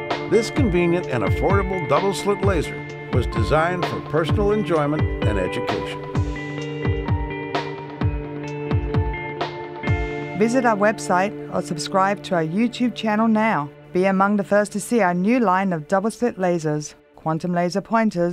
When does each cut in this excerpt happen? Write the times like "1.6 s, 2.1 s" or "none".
14.5 s